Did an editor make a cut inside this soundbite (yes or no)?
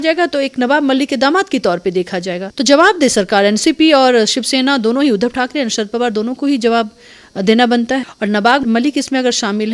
yes